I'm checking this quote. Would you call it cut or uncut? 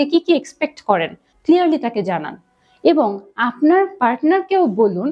cut